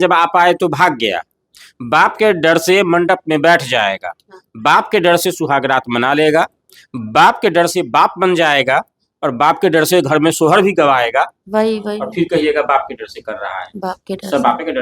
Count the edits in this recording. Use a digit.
1